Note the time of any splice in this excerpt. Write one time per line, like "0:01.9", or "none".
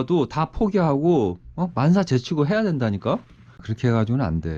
0:03.7